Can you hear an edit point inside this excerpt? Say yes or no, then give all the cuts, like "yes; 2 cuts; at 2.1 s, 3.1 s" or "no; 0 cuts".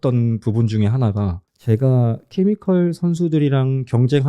yes; 1 cut; at 1.5 s